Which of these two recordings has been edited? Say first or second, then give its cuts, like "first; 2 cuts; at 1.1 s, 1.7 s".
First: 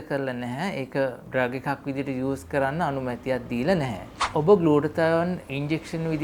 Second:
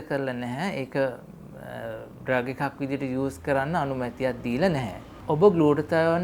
first; 1 cut; at 1.2 s